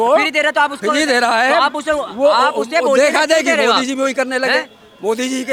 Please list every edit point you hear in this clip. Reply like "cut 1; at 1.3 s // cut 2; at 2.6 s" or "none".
none